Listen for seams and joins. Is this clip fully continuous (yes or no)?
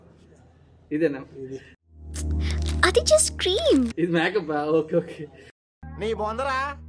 yes